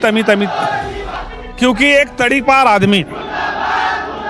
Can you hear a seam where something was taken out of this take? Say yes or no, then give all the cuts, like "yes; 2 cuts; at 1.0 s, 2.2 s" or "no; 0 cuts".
yes; 1 cut; at 1.2 s